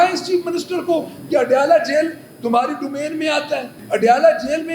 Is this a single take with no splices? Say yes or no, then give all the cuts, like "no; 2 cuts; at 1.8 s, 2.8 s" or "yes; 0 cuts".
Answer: no; 1 cut; at 3.8 s